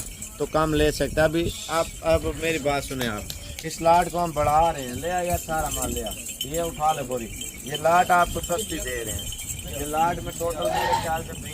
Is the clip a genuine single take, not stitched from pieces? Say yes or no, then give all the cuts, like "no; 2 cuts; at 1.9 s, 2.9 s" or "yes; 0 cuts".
yes; 0 cuts